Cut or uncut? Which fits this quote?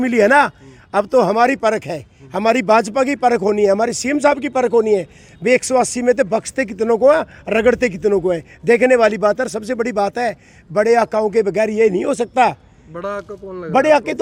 uncut